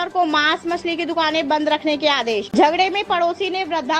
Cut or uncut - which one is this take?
cut